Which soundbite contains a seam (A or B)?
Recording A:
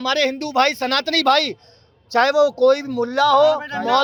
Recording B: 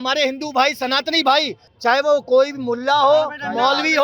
B